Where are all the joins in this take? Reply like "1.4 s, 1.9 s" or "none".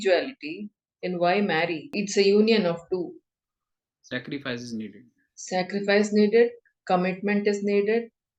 2.0 s